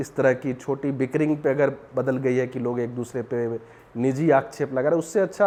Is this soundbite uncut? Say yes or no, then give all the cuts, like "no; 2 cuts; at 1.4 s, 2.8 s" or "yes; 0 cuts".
yes; 0 cuts